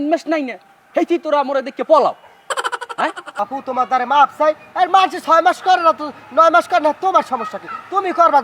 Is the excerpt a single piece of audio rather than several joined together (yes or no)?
no